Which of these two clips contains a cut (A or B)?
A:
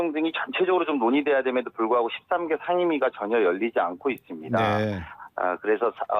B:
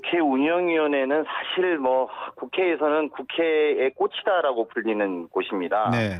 A